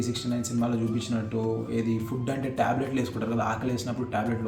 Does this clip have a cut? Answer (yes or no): no